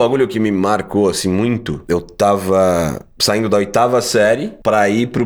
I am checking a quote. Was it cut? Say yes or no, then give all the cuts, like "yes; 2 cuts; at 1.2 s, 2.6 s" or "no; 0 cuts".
no; 0 cuts